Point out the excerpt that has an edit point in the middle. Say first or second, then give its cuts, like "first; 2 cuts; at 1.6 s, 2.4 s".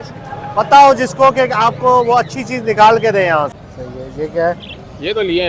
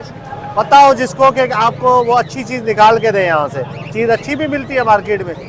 first; 1 cut; at 3.6 s